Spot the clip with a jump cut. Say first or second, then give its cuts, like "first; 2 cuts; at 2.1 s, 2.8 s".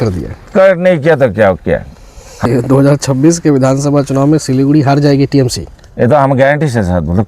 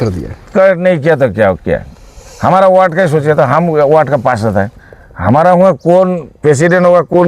first; 1 cut; at 2.4 s